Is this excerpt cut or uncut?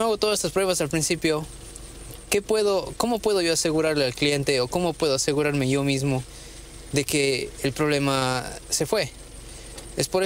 uncut